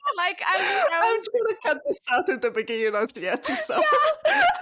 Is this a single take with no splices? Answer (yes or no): no